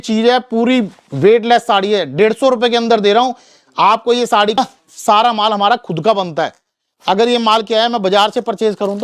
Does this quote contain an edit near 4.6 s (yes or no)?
yes